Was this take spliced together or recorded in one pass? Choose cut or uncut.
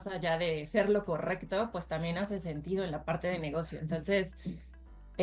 uncut